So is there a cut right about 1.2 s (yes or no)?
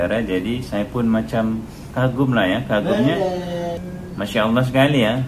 no